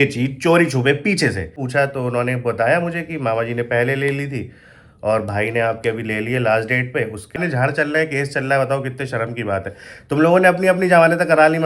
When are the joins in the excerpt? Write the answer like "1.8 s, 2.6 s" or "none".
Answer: 1.5 s, 7.4 s